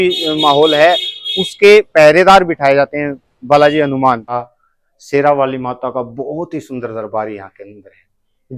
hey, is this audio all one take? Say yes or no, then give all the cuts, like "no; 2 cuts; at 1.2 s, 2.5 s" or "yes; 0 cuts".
no; 1 cut; at 4.4 s